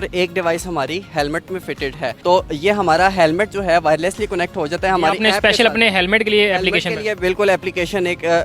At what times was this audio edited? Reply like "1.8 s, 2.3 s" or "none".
none